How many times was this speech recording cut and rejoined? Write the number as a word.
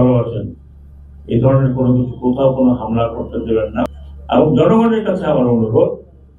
one